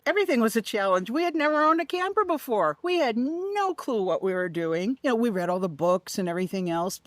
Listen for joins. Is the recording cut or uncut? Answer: uncut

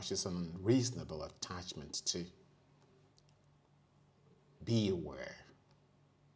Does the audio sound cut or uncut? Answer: cut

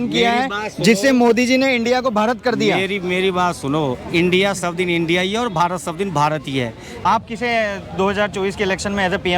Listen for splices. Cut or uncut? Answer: cut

